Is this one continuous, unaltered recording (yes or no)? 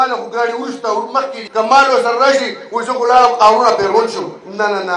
no